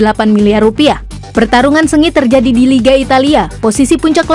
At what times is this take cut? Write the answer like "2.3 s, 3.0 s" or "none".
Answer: 1.1 s